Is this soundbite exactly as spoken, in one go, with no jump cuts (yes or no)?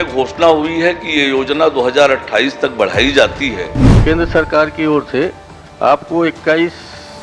no